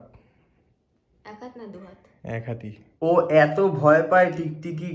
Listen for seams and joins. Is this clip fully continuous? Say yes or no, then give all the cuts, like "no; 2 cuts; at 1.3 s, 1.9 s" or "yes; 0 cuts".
no; 1 cut; at 2.9 s